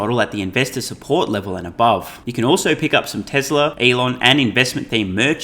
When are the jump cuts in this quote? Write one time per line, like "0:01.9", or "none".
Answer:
0:02.2
0:03.8